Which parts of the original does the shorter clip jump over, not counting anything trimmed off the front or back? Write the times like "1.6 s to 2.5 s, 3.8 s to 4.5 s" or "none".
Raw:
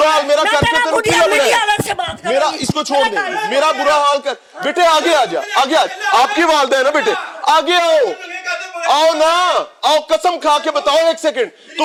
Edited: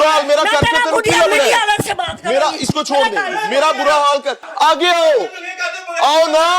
4.4 s to 7.3 s